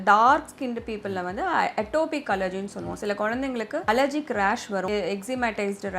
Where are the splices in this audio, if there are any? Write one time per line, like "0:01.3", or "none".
0:03.8
0:04.9